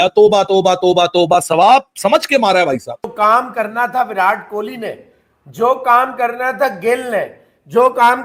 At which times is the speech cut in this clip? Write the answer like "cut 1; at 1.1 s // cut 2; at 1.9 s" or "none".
cut 1; at 3.1 s